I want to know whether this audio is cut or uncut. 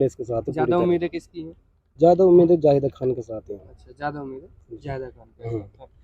uncut